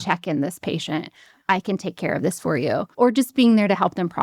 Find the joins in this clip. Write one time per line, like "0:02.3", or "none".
0:02.9